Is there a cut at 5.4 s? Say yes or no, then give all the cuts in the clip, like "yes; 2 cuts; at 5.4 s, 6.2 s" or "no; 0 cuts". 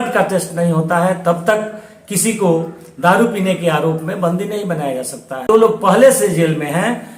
yes; 1 cut; at 5.4 s